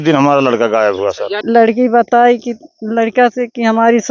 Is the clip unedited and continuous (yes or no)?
no